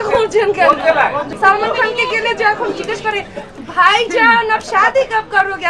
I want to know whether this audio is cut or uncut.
cut